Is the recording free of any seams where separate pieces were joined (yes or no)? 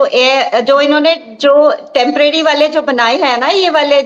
yes